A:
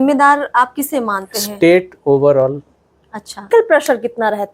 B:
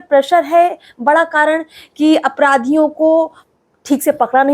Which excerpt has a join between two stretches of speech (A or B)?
A